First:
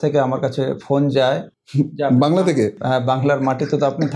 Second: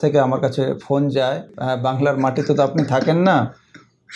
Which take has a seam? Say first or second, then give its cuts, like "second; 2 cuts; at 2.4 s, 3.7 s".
second; 1 cut; at 1.6 s